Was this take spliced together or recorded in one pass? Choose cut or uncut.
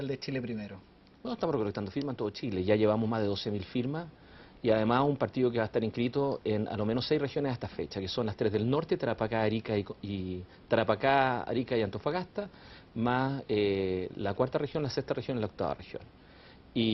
cut